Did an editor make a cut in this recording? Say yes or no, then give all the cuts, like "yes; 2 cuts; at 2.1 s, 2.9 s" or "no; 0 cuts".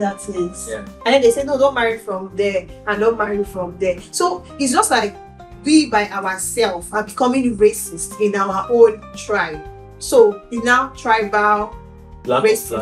no; 0 cuts